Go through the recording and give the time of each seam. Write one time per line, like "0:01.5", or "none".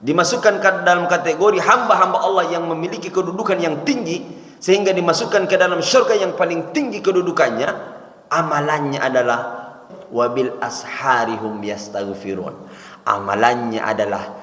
0:09.8